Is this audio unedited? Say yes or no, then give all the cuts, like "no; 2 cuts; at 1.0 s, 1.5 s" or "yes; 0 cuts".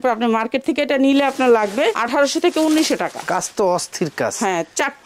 yes; 0 cuts